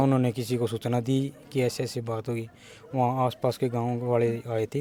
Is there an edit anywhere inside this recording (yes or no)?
no